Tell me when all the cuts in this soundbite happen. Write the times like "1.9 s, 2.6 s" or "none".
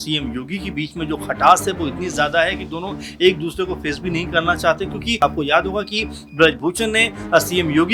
5.2 s

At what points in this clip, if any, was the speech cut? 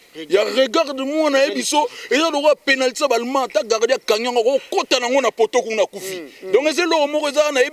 none

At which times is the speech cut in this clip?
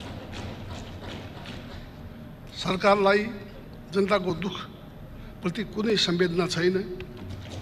1.7 s

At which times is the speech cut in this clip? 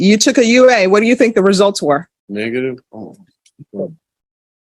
2.2 s

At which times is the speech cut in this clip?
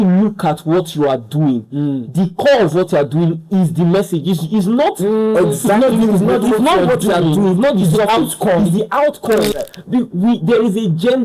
9.6 s

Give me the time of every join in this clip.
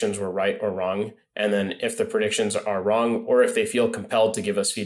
none

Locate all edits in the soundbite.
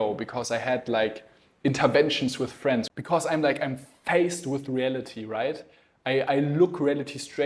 2.9 s

